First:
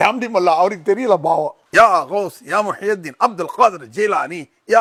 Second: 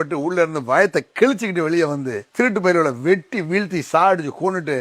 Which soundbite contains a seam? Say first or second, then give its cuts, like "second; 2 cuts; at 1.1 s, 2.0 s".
second; 1 cut; at 2.2 s